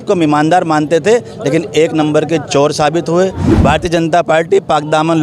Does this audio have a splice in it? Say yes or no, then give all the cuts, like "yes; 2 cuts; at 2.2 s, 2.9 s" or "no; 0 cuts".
yes; 1 cut; at 3.5 s